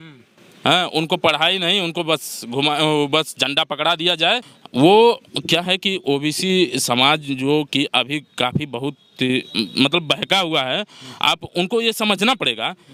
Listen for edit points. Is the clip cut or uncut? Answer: uncut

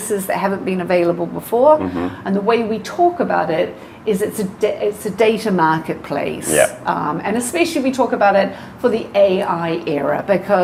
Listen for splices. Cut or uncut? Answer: uncut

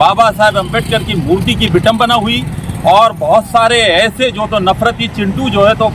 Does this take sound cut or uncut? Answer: uncut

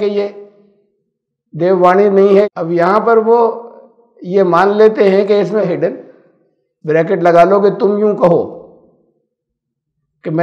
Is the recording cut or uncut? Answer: cut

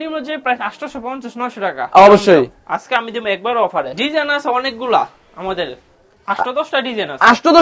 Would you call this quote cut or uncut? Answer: cut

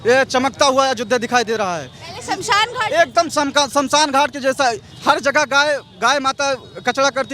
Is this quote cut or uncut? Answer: uncut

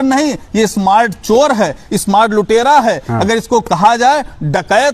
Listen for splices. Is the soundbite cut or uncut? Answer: uncut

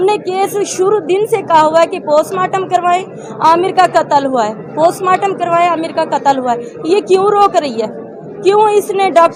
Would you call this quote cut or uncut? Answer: uncut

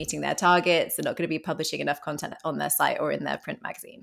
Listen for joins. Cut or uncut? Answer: cut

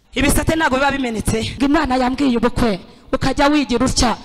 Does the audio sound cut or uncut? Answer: cut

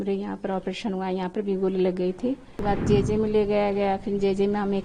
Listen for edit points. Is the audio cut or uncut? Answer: cut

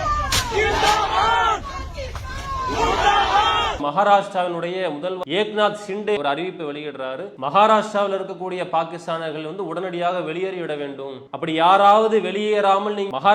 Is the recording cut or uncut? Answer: cut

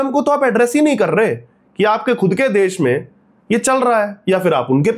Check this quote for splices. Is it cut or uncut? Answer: uncut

